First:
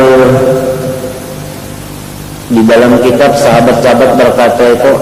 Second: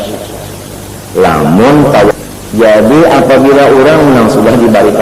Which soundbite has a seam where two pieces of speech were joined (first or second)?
second